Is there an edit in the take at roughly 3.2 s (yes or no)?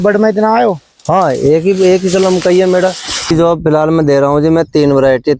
yes